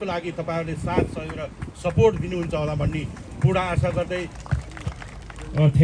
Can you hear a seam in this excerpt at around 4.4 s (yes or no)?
yes